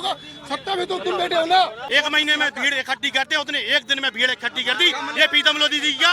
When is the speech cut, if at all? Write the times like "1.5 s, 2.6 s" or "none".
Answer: 1.8 s

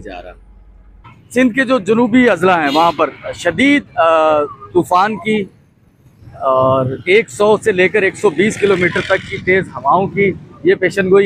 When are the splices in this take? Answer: 1.2 s

